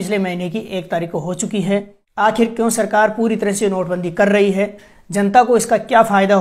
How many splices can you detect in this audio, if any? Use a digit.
1